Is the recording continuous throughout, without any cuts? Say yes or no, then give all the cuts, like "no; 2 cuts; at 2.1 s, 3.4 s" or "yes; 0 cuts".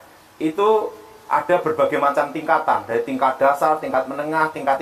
yes; 0 cuts